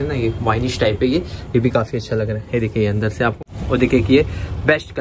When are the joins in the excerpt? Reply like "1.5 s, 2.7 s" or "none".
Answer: 3.4 s